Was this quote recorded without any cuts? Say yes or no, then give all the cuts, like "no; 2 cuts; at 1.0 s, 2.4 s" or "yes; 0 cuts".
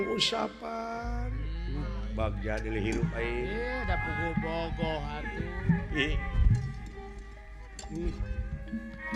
yes; 0 cuts